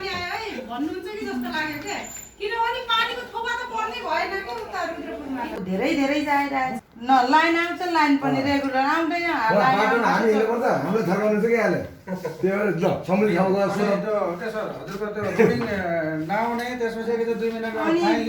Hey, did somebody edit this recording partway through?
yes; 2 cuts; at 5.6 s, 6.9 s

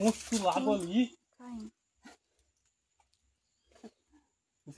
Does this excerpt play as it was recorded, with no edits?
yes; 0 cuts

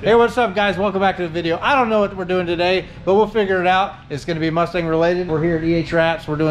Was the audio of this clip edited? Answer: yes; 1 cut; at 5.3 s

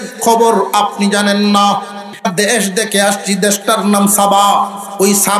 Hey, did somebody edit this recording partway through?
yes; 1 cut; at 2.0 s

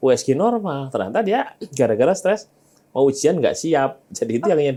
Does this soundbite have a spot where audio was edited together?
no; 0 cuts

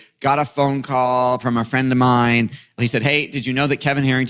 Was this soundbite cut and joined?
yes; 2 cuts; at 1.4 s, 2.8 s

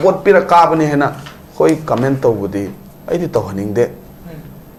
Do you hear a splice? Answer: no; 0 cuts

